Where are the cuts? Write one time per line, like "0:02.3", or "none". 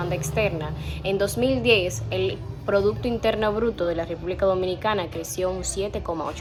none